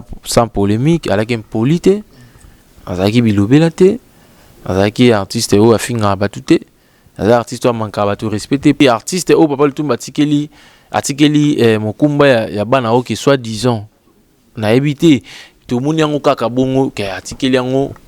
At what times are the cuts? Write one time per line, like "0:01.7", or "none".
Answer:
0:08.8